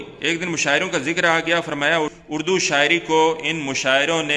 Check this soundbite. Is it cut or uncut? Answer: cut